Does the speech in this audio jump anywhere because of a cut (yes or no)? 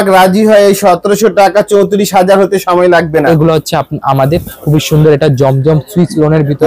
yes